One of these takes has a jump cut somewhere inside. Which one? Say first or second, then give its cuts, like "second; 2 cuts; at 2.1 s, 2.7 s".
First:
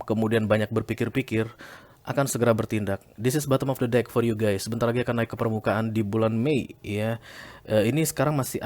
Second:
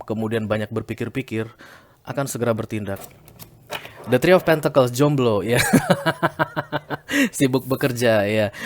second; 1 cut; at 3.1 s